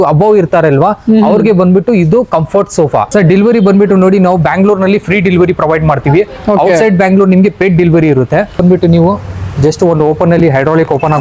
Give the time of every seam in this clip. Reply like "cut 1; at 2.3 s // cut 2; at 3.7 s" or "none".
cut 1; at 3.1 s // cut 2; at 8.6 s